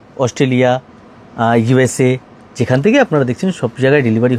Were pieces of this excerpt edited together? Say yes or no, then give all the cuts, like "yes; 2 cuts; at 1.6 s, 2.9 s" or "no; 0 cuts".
no; 0 cuts